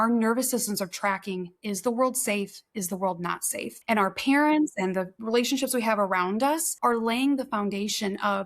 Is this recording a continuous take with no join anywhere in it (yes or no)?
no